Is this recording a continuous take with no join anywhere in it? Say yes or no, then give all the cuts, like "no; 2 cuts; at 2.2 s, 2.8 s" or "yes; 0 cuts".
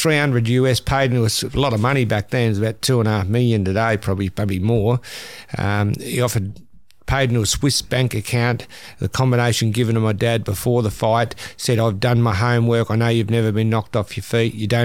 yes; 0 cuts